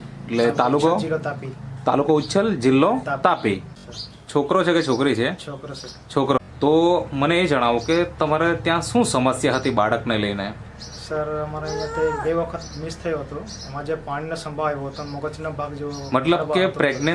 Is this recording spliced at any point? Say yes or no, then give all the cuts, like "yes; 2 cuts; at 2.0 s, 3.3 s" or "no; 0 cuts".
yes; 2 cuts; at 3.8 s, 6.4 s